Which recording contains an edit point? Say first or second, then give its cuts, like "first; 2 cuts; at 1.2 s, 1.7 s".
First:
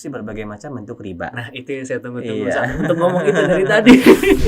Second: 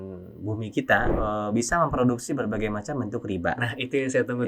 second; 1 cut; at 1.1 s